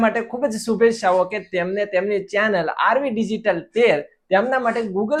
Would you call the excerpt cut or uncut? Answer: uncut